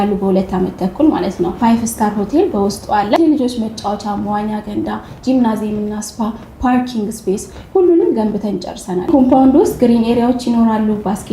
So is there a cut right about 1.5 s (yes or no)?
yes